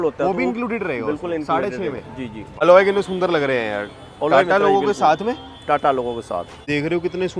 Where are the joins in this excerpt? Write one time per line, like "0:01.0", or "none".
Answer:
0:02.6
0:06.6